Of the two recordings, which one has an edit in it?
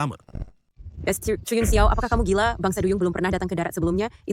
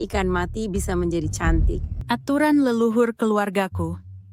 second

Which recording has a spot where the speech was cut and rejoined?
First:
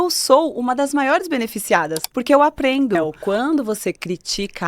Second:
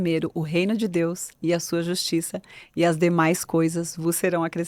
first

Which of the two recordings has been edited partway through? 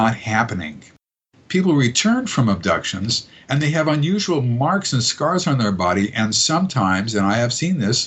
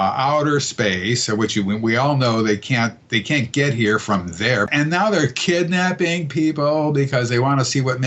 second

